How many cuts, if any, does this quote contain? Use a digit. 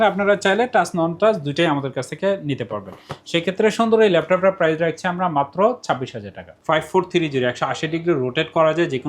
1